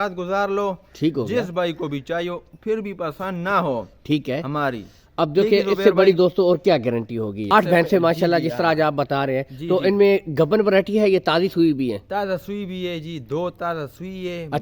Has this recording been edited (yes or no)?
yes